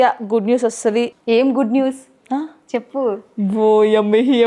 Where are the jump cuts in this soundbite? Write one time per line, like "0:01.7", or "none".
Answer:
0:01.2